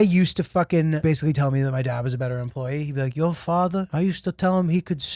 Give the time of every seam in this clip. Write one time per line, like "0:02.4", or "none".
0:01.0
0:03.9